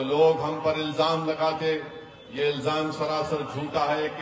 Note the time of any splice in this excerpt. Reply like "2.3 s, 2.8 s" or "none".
none